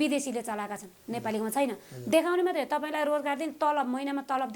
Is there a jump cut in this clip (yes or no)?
no